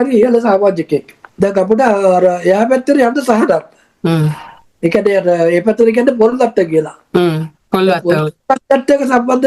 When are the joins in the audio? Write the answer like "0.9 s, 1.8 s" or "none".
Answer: 1.2 s